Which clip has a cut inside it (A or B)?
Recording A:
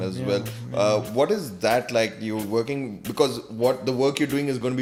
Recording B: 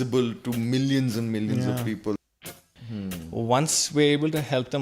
B